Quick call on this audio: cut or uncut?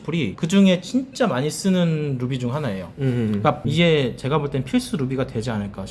cut